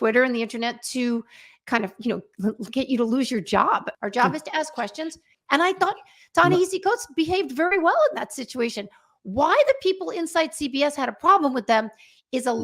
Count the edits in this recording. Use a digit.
2